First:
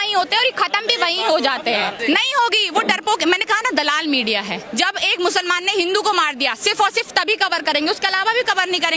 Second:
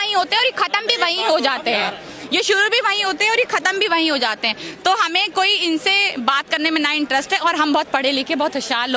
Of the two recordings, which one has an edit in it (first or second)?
first